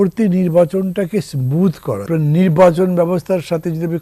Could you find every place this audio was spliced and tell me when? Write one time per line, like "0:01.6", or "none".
0:02.0